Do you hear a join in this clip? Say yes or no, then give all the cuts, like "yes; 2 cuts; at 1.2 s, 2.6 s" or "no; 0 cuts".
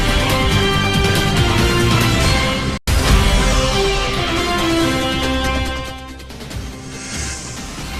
no; 0 cuts